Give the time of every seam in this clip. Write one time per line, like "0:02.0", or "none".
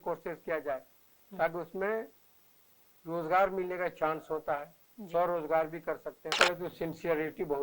0:06.3